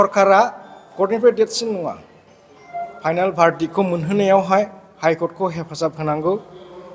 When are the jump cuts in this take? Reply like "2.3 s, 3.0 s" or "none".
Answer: 2.8 s